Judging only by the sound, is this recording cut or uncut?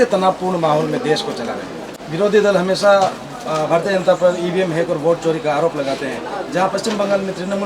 cut